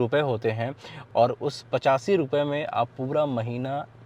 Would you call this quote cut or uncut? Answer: cut